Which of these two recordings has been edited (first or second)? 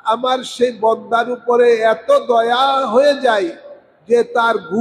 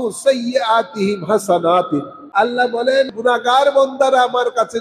second